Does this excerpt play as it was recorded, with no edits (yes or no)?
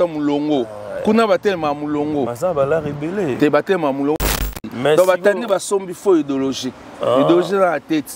no